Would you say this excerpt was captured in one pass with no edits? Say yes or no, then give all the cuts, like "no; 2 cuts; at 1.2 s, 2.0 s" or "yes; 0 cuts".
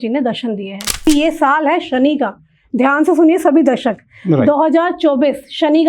no; 1 cut; at 1.1 s